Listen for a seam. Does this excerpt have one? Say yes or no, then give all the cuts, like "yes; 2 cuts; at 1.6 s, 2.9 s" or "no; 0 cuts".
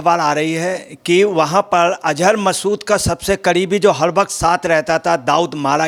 no; 0 cuts